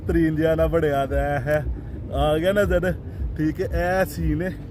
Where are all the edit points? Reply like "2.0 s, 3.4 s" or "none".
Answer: none